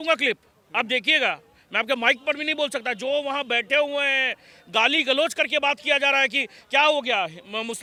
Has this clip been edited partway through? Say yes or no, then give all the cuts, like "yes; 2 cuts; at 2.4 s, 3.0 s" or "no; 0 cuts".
no; 0 cuts